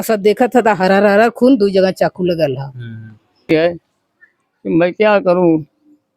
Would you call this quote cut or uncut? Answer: cut